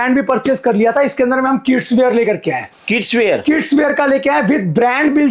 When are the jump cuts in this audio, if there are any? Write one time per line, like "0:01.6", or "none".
none